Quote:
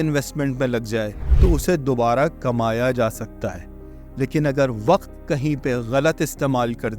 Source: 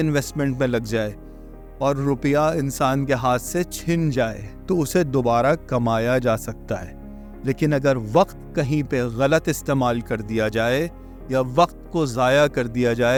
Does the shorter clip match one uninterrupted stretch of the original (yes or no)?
no